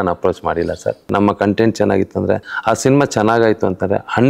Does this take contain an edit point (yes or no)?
yes